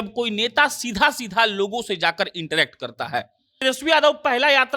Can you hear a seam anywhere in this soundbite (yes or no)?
yes